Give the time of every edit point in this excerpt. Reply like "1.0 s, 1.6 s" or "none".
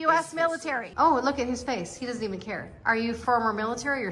0.9 s, 3.2 s